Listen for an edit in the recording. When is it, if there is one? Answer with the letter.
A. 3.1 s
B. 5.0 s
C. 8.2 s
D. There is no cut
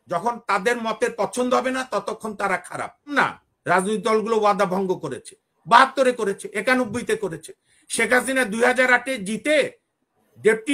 A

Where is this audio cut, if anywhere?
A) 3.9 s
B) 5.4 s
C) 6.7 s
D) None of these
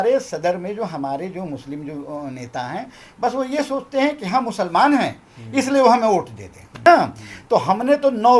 C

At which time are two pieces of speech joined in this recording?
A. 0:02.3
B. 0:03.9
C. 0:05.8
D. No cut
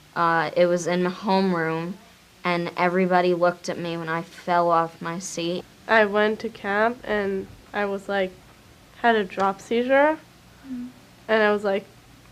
D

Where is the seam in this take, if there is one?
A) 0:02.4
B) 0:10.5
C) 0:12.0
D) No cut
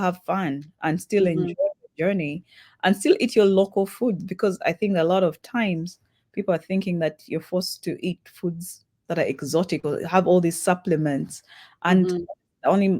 D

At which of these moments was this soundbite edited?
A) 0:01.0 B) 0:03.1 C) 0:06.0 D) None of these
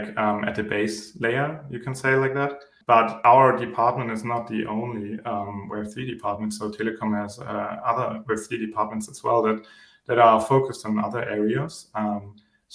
B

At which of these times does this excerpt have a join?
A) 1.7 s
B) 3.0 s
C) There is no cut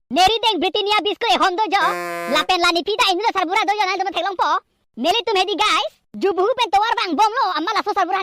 C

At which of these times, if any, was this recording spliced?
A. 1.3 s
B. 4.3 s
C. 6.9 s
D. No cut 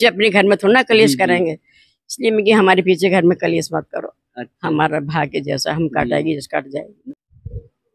C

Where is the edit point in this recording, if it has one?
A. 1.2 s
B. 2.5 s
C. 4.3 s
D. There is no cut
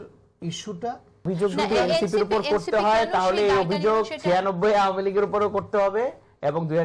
A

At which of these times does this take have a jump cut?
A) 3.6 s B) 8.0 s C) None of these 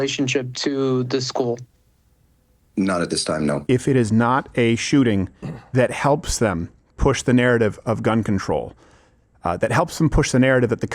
A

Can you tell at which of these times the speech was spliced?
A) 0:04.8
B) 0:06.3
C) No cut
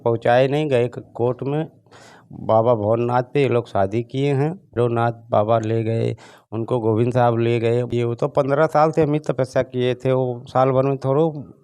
A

